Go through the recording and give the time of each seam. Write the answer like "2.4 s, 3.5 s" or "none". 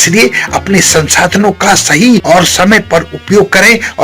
2.2 s